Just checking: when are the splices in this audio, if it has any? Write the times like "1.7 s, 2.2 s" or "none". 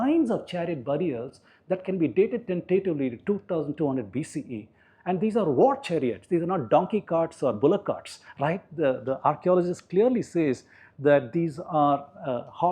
none